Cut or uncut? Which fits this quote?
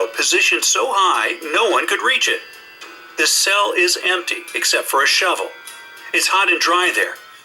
uncut